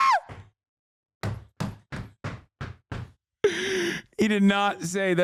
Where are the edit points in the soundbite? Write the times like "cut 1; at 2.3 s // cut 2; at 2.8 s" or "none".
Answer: none